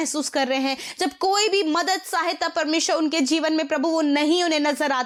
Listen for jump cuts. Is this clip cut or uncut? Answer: uncut